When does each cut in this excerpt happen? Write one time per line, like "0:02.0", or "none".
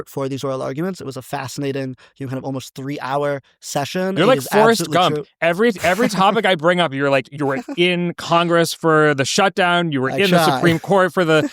none